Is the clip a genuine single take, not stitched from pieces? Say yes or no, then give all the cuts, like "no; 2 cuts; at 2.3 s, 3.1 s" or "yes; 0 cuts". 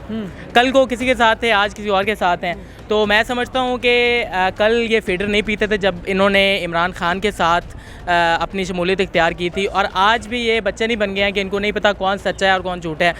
yes; 0 cuts